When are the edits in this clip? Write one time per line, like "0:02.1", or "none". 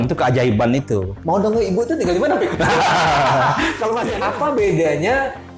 0:01.1
0:04.1